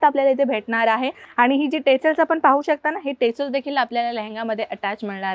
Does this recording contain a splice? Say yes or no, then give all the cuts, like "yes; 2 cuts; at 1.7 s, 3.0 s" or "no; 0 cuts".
yes; 1 cut; at 1.2 s